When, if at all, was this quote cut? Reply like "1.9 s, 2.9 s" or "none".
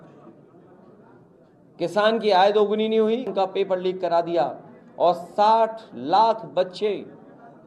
3.3 s

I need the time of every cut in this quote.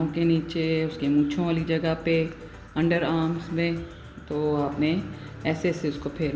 none

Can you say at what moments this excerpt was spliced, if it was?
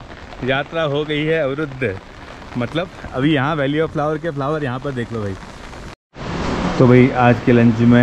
5.9 s

